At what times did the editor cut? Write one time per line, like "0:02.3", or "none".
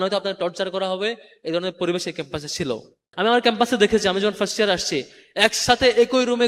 0:03.0